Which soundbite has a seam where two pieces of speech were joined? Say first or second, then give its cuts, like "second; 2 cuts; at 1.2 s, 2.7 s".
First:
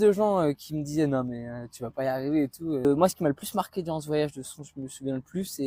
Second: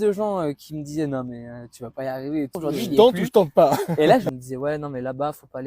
second; 2 cuts; at 2.6 s, 4.3 s